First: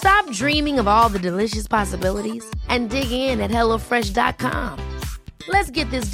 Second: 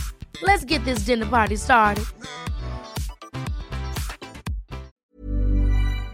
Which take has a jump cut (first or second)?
second